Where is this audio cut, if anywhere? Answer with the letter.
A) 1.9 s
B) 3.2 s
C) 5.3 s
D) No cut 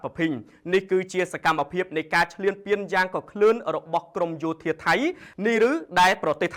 C